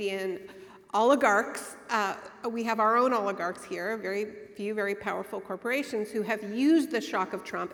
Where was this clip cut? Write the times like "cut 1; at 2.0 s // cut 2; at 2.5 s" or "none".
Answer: none